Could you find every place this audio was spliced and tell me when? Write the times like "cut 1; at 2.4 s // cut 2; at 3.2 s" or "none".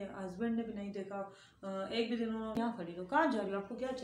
cut 1; at 2.6 s